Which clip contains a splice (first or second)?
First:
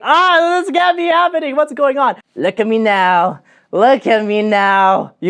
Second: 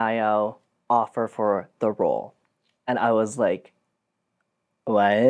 first